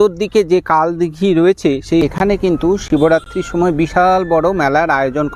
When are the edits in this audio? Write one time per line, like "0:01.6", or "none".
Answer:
0:02.0

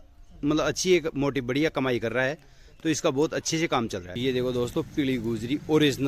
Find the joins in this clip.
0:04.1

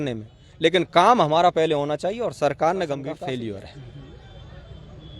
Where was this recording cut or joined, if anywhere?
0:03.2

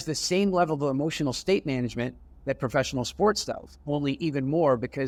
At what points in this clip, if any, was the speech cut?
none

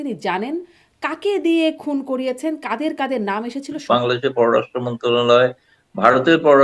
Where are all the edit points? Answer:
0:03.8

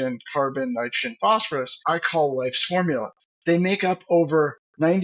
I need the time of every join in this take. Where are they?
0:01.8

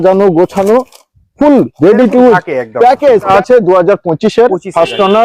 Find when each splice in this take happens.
0:03.3

